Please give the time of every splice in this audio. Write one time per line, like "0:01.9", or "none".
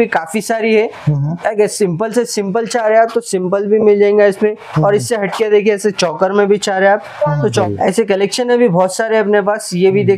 0:07.6